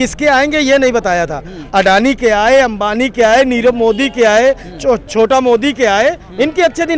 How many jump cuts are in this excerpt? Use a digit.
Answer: 0